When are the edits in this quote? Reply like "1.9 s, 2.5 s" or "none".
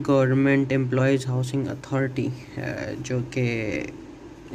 none